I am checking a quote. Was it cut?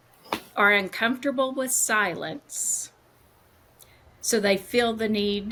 no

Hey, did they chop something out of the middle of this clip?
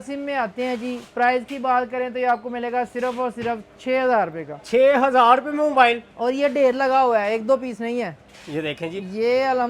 no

